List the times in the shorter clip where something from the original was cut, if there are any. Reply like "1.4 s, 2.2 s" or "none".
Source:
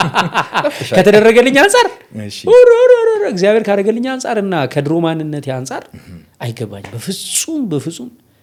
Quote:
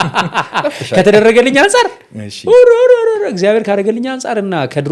none